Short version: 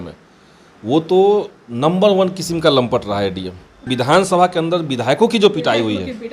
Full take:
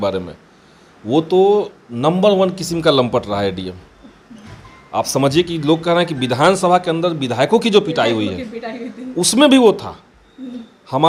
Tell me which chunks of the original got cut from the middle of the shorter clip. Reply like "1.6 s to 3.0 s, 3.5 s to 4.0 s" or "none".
4.1 s to 6.2 s